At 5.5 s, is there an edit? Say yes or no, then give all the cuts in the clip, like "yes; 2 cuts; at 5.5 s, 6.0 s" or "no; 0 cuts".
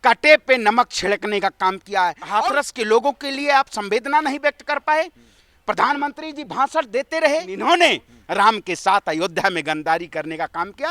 no; 2 cuts; at 2.2 s, 7.5 s